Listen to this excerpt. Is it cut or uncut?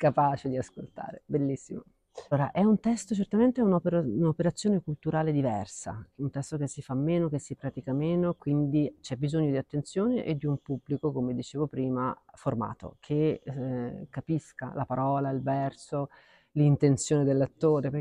cut